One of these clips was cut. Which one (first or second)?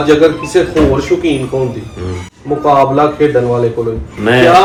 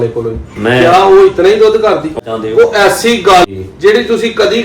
second